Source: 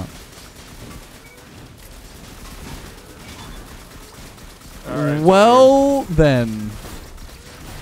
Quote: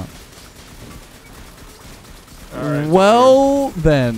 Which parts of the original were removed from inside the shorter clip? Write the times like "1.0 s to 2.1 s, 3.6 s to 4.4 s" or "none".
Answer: 1.3 s to 3.6 s